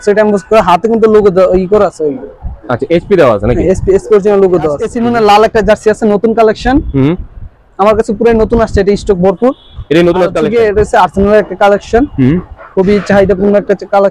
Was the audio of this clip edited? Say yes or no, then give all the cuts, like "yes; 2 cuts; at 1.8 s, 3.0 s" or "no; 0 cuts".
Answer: yes; 2 cuts; at 4.9 s, 10.4 s